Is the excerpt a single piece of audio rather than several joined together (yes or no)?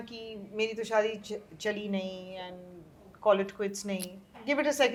yes